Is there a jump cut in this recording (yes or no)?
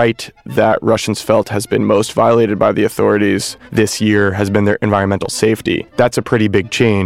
yes